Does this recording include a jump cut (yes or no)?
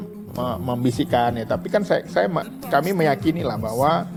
no